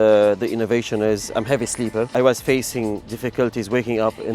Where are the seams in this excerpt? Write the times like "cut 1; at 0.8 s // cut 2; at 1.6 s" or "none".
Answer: cut 1; at 2.1 s